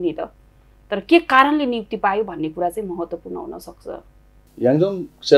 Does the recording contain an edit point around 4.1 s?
no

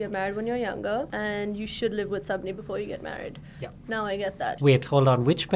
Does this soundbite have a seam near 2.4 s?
no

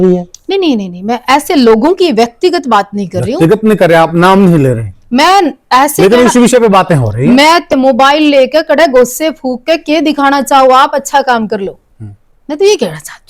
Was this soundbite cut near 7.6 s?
yes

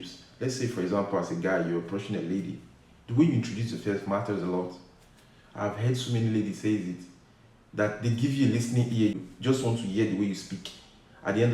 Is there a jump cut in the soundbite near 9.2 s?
yes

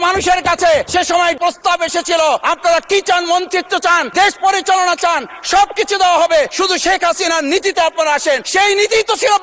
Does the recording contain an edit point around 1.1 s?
yes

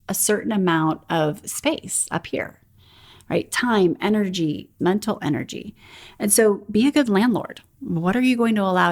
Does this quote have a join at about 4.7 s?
yes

